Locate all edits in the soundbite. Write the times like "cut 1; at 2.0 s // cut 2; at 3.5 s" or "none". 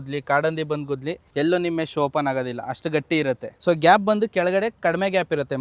cut 1; at 1.2 s // cut 2; at 3.5 s